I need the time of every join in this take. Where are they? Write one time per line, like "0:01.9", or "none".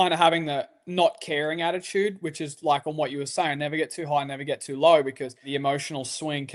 0:05.5